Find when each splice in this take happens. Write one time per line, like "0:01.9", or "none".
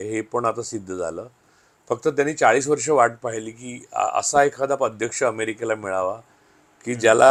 none